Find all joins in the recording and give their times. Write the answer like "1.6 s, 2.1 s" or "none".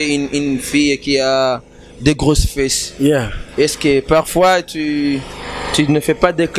none